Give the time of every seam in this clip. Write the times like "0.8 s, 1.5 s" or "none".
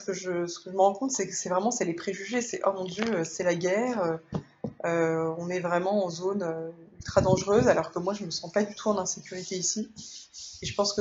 none

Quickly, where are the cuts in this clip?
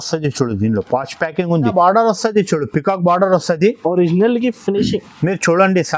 1.7 s

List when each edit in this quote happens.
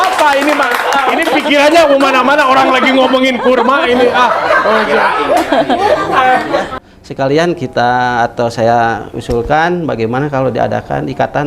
6.7 s

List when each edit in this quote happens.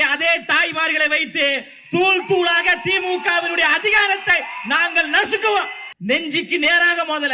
5.8 s

